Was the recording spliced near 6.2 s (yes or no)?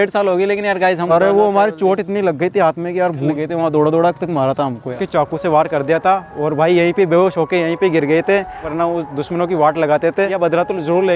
no